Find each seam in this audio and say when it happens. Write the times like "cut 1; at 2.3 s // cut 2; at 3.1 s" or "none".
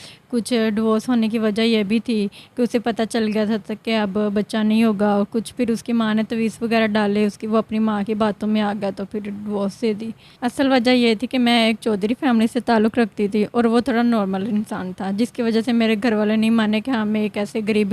cut 1; at 10.2 s